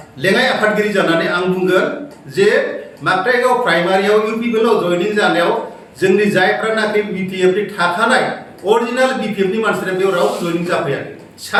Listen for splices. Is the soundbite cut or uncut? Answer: uncut